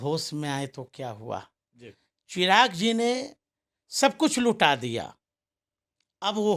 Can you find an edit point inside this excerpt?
no; 0 cuts

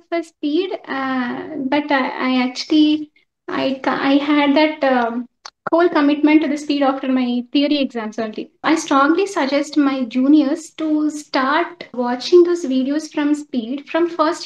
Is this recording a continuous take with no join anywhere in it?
no; 2 cuts; at 8.6 s, 11.9 s

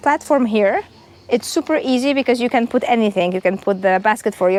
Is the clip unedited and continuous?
yes; 0 cuts

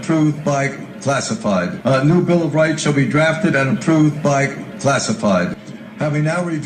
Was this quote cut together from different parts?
yes; 2 cuts; at 1.8 s, 5.5 s

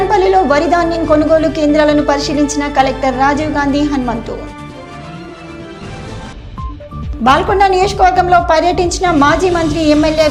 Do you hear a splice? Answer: no; 0 cuts

